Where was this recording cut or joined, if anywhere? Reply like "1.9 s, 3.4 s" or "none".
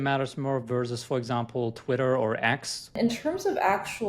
3.0 s